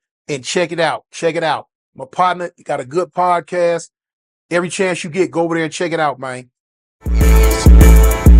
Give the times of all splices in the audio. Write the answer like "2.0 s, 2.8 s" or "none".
7.2 s